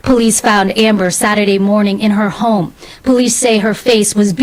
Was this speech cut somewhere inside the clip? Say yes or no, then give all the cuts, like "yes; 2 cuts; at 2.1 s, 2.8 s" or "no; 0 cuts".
no; 0 cuts